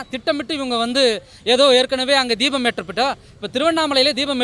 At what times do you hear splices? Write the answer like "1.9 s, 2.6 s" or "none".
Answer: none